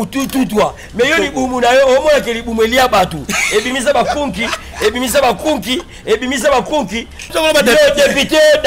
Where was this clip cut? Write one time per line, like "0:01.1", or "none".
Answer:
0:07.3